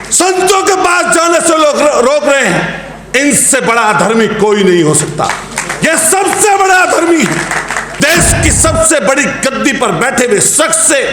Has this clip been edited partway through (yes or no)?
yes